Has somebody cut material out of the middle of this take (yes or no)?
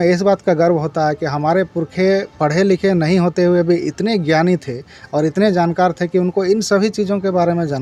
no